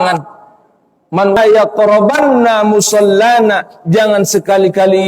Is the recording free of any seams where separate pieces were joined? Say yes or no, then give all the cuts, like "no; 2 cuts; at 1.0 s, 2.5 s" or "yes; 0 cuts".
no; 1 cut; at 1.4 s